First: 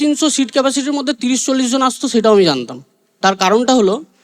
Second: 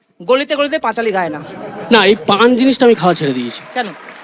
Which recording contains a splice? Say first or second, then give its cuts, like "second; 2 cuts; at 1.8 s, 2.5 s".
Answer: second; 1 cut; at 1.7 s